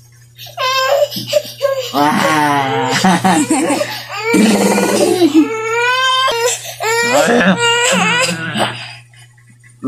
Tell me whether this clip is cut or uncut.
cut